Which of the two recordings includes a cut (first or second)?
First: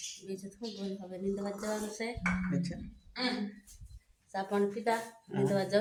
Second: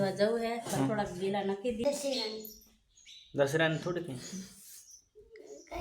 second